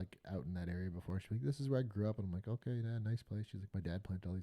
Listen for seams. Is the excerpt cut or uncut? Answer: uncut